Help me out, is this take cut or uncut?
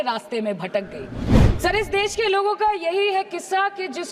cut